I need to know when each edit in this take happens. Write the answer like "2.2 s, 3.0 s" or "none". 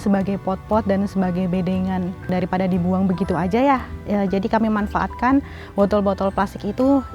2.2 s